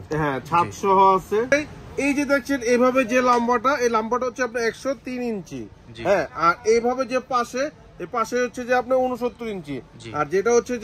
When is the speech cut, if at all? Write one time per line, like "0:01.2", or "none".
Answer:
0:01.5